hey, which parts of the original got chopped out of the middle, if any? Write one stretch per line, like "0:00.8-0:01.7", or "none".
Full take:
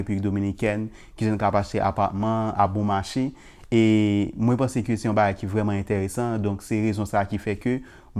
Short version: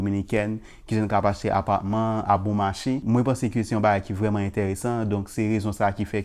0:03.3-0:04.4